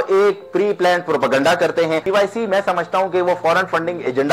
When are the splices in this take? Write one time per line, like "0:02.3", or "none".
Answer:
0:02.0